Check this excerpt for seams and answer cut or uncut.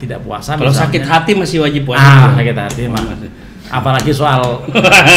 uncut